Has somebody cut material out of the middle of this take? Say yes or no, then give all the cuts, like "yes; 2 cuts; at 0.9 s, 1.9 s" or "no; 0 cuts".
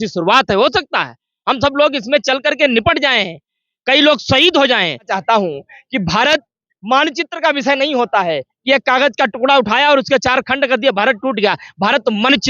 yes; 1 cut; at 5.1 s